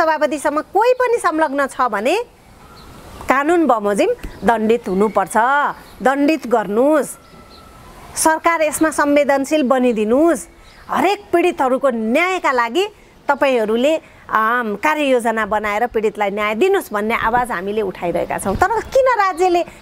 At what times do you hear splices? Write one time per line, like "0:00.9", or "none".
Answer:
none